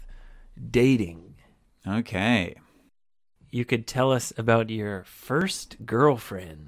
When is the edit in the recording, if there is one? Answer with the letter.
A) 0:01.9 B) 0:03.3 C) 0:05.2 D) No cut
B